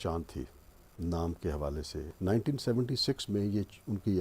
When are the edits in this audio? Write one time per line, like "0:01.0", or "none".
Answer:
0:02.0